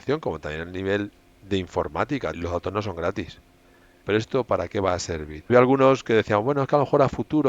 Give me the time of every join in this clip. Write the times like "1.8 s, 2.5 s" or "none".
2.4 s, 4.0 s, 5.5 s